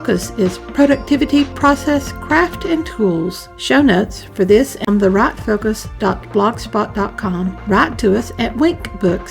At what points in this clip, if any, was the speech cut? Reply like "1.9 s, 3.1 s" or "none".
5.9 s